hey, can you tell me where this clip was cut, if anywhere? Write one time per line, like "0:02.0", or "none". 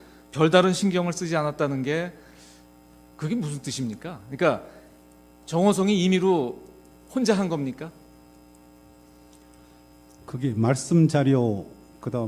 none